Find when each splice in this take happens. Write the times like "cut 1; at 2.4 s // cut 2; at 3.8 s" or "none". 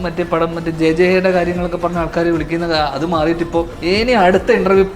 cut 1; at 3.7 s

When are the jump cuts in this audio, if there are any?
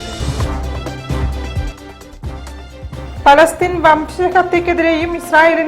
cut 1; at 2.7 s

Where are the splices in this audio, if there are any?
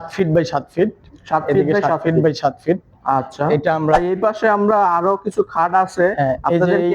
cut 1; at 4.0 s

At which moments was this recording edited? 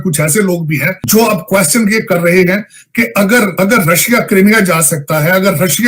none

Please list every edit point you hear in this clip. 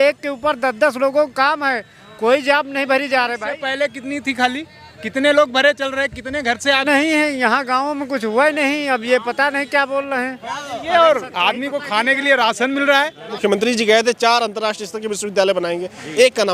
cut 1; at 6.8 s // cut 2; at 13.4 s

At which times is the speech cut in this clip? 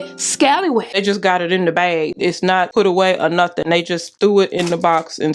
cut 1; at 0.9 s // cut 2; at 2.7 s // cut 3; at 4.0 s

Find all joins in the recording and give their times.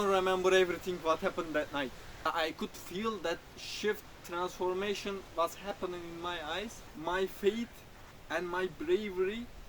cut 1; at 2.3 s // cut 2; at 6.8 s

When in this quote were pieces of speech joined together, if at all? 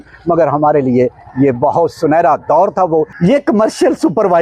cut 1; at 3.1 s

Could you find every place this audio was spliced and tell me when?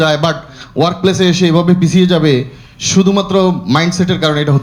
none

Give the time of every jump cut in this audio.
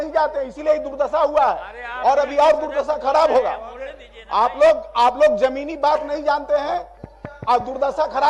none

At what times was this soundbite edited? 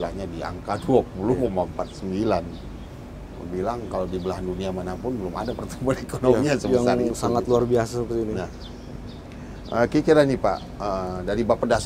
none

